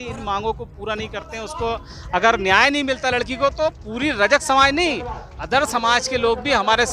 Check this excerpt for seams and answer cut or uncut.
uncut